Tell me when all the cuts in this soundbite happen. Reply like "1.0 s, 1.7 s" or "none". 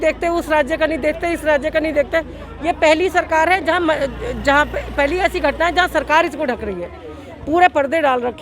none